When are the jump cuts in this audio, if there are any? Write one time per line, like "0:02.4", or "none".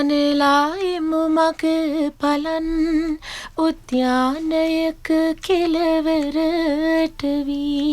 none